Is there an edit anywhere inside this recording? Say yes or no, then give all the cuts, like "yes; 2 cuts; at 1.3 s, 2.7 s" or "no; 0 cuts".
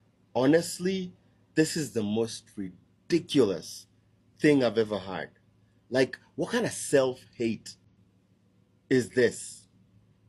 no; 0 cuts